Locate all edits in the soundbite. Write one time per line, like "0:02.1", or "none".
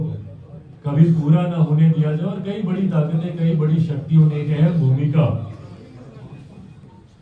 none